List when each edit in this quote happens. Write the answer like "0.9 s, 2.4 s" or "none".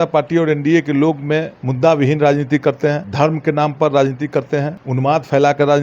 1.6 s, 3.0 s, 4.8 s